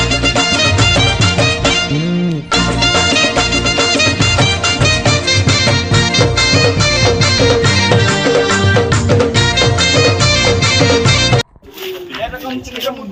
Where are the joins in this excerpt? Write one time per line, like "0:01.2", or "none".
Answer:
none

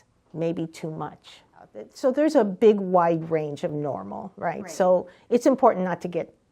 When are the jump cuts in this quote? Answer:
0:01.8

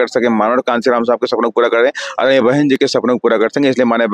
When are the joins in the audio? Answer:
none

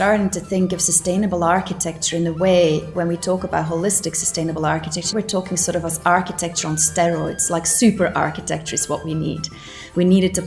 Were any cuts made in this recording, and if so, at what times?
0:02.9
0:05.1

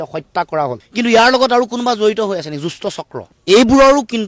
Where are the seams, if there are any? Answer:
0:03.2

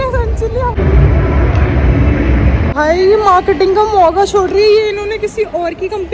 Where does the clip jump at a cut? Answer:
0:00.8
0:02.7

